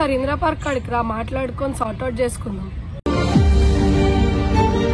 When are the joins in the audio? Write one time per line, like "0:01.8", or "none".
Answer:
none